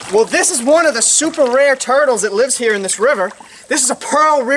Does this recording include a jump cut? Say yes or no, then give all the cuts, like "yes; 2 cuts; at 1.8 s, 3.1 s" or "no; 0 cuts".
no; 0 cuts